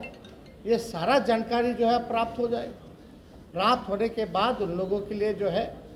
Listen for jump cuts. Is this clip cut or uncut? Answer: uncut